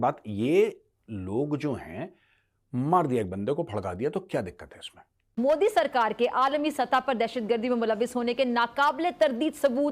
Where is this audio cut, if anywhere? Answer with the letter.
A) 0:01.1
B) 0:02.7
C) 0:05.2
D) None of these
C